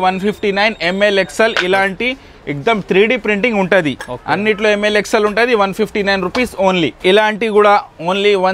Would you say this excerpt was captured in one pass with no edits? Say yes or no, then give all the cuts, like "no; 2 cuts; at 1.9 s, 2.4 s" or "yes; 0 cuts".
yes; 0 cuts